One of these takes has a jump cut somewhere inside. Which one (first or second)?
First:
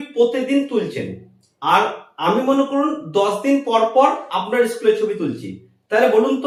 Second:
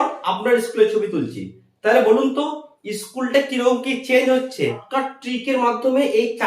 second